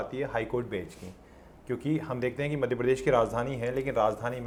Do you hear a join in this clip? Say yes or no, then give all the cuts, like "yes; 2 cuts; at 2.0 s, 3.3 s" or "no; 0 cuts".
no; 0 cuts